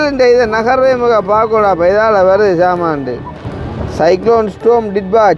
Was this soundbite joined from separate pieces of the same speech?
yes; 1 cut; at 3.6 s

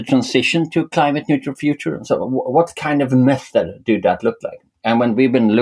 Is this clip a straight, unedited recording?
yes; 0 cuts

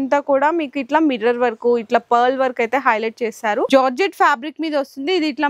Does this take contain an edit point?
yes; 1 cut; at 3.7 s

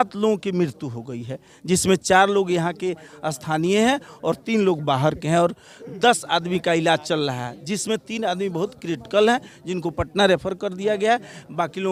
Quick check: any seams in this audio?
no; 0 cuts

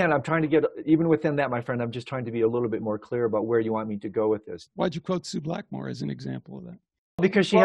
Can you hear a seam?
no; 0 cuts

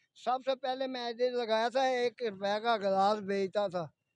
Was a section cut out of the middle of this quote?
no; 0 cuts

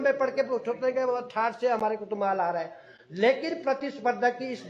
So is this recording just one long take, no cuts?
yes; 0 cuts

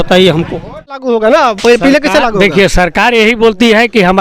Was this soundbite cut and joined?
yes; 1 cut; at 1.0 s

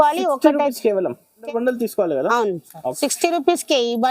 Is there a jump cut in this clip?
yes; 2 cuts; at 1.5 s, 3.0 s

